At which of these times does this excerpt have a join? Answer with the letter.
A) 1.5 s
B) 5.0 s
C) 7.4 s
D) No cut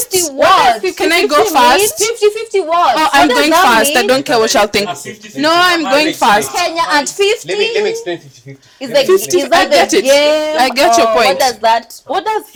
D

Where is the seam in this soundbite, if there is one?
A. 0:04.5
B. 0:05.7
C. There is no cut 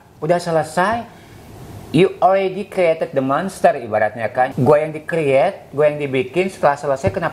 A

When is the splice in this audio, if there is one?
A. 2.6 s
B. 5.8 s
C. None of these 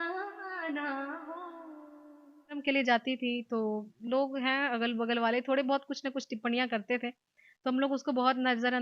A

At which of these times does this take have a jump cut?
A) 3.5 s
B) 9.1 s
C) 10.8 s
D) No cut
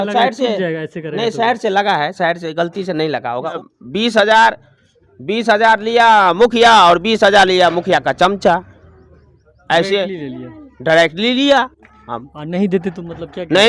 A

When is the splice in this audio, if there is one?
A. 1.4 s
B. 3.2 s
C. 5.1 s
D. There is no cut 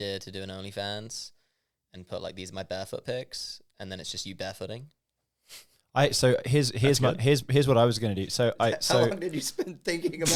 D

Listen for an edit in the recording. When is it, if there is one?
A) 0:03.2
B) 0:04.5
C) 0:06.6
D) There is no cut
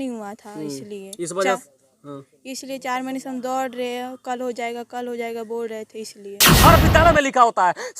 C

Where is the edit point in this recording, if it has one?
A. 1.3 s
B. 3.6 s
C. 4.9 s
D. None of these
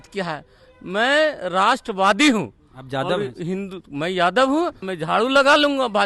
C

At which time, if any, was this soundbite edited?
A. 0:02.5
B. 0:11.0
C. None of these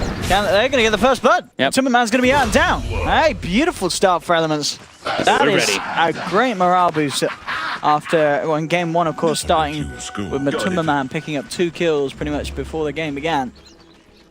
B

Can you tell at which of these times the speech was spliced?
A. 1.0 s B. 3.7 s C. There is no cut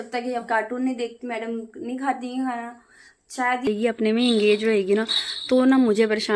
B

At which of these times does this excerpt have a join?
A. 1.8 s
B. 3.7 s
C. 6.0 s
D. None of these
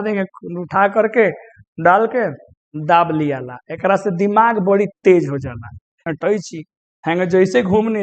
C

